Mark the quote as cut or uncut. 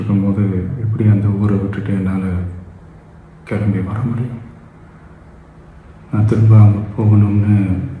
uncut